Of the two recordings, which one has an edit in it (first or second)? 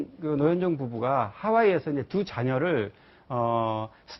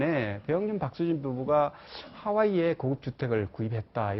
second